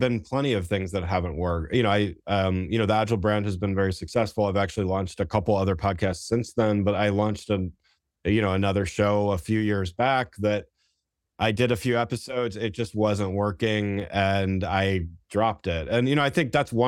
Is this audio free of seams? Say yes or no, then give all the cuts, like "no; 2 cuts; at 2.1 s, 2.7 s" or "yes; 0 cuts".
yes; 0 cuts